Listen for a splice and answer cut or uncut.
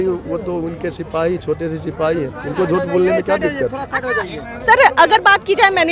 uncut